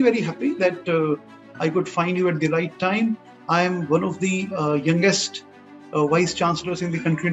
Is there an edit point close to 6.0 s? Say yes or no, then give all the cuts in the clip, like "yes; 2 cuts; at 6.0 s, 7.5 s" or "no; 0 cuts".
no; 0 cuts